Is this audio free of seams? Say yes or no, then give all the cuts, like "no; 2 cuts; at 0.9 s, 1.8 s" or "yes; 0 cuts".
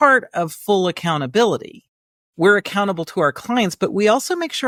yes; 0 cuts